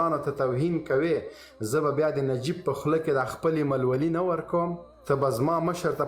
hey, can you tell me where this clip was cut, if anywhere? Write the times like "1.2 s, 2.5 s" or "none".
4.9 s